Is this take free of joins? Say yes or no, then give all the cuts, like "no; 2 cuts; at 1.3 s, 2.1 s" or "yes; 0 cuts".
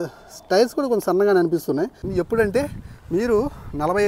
no; 1 cut; at 2.0 s